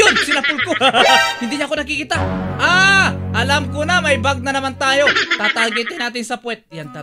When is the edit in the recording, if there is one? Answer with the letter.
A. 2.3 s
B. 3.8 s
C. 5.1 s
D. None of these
C